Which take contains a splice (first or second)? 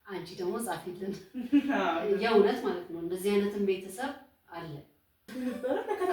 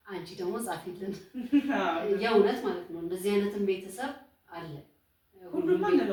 first